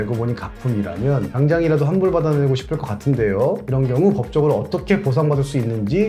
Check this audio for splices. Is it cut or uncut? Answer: uncut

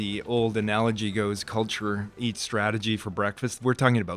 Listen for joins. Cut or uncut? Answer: cut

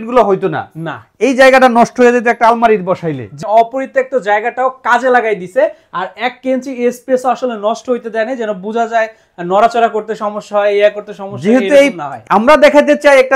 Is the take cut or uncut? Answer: cut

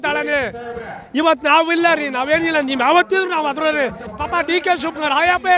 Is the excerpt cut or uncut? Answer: cut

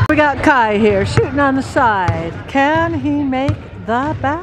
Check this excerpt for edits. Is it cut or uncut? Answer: uncut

